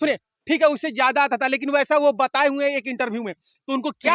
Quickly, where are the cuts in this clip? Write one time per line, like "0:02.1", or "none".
none